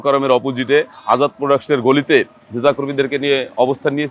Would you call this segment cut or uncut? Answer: uncut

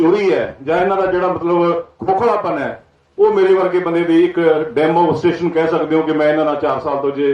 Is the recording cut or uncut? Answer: uncut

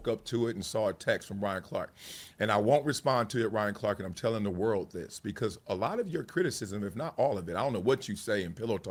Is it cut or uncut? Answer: uncut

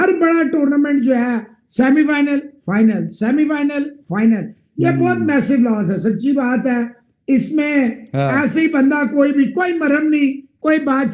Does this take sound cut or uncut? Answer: uncut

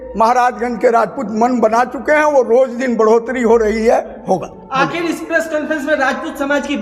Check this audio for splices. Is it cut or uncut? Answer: uncut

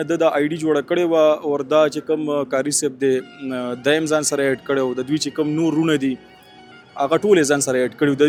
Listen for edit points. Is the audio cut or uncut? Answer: uncut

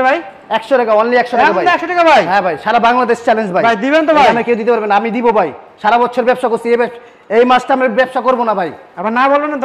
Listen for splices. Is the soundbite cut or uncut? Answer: uncut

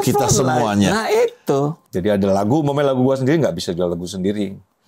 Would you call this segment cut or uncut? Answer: cut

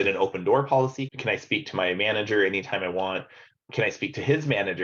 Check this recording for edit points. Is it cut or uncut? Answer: cut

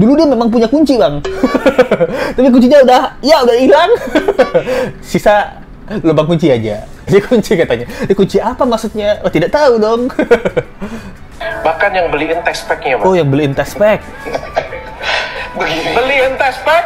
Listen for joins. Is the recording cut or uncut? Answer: uncut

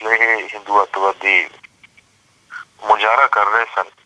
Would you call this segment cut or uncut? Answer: uncut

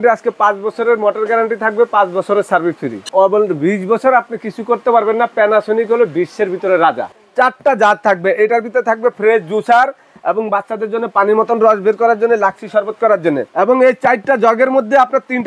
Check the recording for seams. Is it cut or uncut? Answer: cut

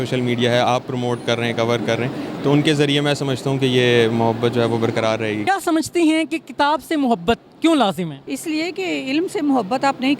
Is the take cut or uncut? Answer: cut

